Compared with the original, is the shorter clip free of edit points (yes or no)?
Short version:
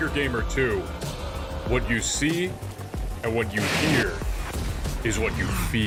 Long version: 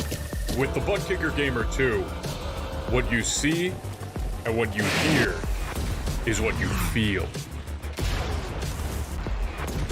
yes